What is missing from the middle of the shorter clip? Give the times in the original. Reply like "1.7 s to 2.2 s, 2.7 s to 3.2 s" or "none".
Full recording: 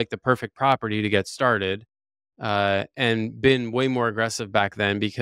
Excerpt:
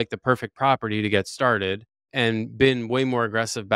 2.1 s to 2.9 s

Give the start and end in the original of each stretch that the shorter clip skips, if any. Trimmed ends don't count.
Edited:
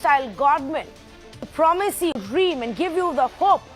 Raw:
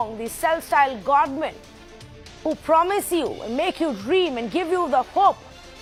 2.2 s to 2.6 s, 3.3 s to 4.0 s

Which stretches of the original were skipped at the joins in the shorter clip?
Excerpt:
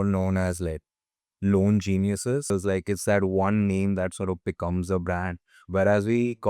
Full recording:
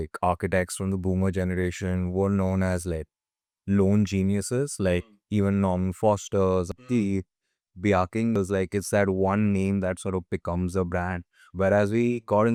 4.7 s to 8.3 s

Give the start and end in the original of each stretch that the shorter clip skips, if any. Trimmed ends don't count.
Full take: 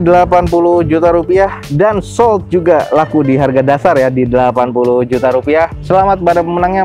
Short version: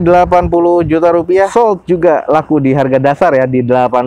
1.5 s to 2.1 s

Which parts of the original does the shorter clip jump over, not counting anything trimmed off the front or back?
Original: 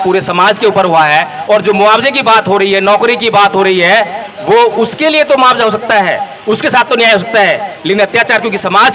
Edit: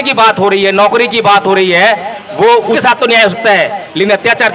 4.9 s to 6.7 s

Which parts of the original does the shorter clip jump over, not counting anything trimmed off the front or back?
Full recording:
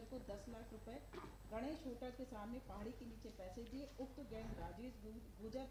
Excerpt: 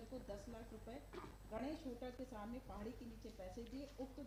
none

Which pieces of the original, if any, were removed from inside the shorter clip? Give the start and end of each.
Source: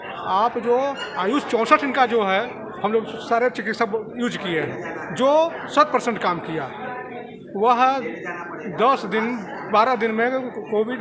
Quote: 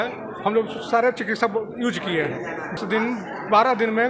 5.2 s to 9.0 s

